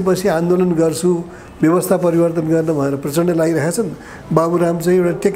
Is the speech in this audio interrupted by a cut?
no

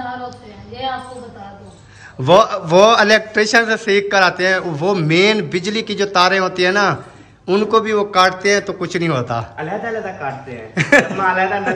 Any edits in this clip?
no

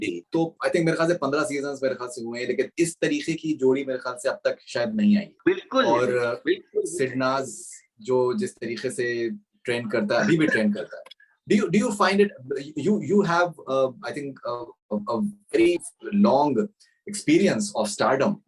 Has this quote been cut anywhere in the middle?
no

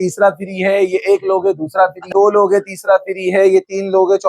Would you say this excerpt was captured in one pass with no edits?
no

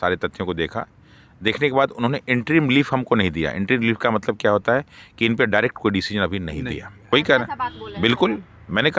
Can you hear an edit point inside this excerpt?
yes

